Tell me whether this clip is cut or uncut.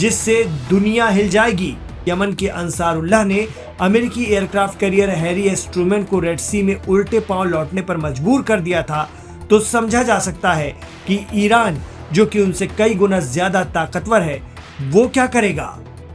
cut